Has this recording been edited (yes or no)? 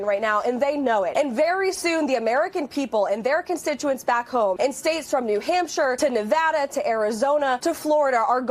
no